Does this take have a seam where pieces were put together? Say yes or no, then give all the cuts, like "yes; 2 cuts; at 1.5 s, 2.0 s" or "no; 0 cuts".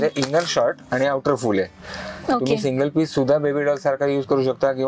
no; 0 cuts